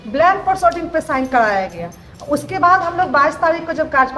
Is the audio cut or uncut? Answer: uncut